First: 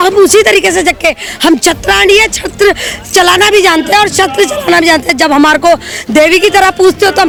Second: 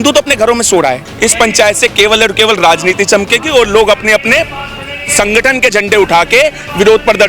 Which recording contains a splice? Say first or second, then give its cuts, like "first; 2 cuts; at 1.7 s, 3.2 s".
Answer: second; 1 cut; at 1.1 s